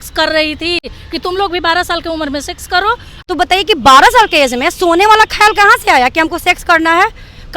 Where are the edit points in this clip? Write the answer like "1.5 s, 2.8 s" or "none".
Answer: 0.9 s, 3.1 s